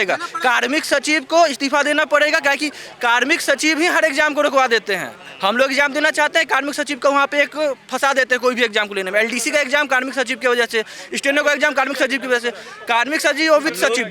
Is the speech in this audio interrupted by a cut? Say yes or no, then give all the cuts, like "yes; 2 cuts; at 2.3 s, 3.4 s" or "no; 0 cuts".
no; 0 cuts